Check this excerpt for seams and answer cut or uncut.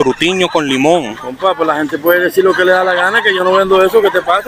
uncut